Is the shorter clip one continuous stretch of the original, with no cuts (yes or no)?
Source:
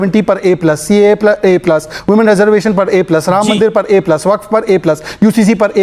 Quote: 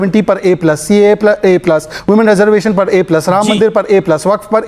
yes